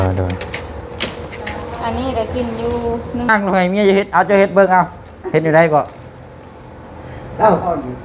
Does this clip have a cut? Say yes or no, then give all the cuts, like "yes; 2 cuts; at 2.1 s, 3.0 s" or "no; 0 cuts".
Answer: yes; 1 cut; at 3.3 s